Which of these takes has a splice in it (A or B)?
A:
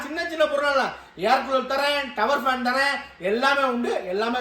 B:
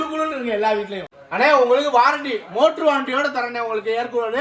B